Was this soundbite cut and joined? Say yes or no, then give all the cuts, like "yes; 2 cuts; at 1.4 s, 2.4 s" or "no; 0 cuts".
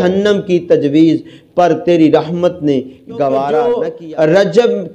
yes; 1 cut; at 3.7 s